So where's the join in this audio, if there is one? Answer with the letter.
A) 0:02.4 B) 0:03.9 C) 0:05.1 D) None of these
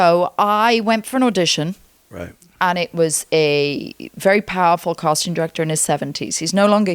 D